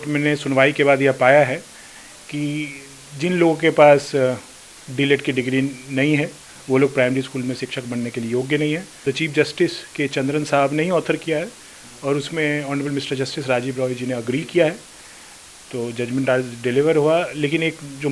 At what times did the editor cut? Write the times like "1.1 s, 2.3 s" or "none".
8.9 s